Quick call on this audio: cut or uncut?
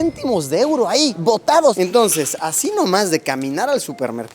cut